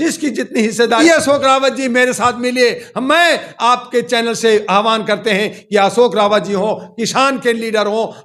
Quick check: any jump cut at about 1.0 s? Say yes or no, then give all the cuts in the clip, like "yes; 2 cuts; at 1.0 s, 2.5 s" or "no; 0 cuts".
yes; 1 cut; at 1.0 s